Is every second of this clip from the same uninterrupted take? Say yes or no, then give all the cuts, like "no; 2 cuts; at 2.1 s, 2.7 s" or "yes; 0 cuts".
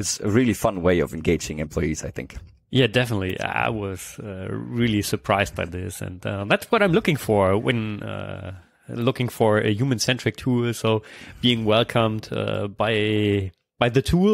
yes; 0 cuts